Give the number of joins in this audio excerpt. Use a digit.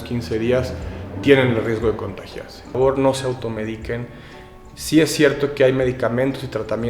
1